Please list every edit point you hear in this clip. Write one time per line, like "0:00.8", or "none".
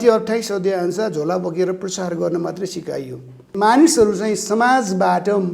0:03.5